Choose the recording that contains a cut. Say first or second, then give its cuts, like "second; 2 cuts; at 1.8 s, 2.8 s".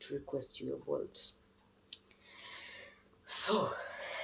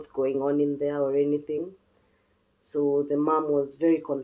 first; 1 cut; at 1.5 s